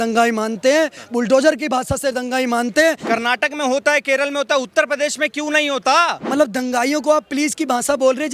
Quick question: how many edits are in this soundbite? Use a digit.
2